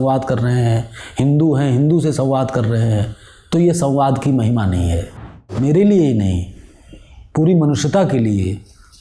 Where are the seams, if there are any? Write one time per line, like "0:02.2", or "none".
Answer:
0:05.5